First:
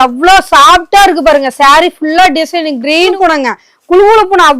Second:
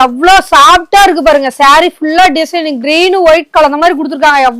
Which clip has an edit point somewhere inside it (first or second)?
first